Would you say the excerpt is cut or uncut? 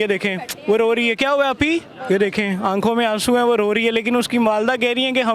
uncut